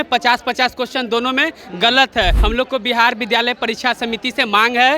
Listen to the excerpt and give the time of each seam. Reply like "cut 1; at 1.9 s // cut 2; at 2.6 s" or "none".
cut 1; at 2.4 s